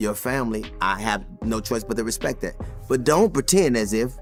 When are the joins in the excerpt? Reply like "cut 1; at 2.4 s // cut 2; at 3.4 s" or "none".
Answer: none